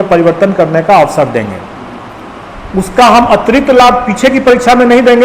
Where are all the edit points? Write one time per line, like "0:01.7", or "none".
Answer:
none